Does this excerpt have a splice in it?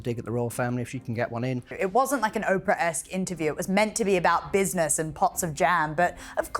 yes; 1 cut; at 1.7 s

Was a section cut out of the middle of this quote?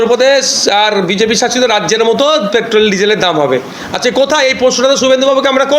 no; 0 cuts

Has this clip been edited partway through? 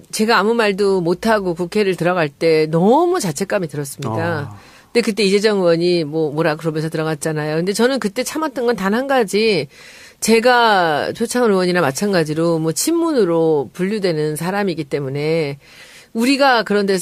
no; 0 cuts

